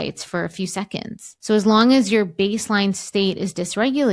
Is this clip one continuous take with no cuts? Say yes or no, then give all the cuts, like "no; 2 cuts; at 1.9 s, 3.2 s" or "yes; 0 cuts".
no; 1 cut; at 1.2 s